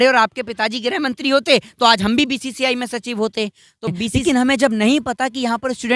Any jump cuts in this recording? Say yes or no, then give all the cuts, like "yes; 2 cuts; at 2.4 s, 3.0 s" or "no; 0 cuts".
yes; 1 cut; at 4.1 s